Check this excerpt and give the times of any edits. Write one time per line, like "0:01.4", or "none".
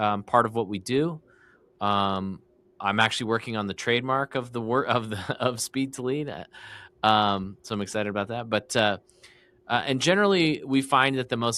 none